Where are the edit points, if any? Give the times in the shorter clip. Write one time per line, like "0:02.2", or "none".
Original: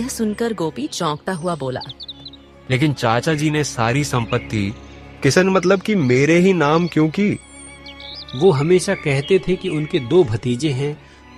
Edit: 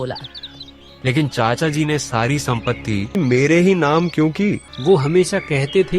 0:03.1
0:04.7